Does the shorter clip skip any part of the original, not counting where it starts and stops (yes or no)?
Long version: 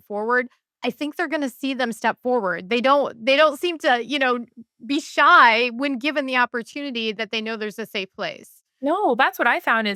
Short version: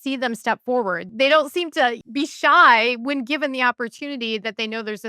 yes